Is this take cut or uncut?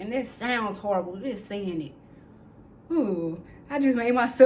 uncut